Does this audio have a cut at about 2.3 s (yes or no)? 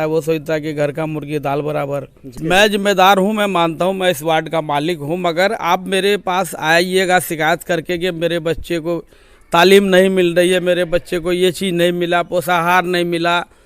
yes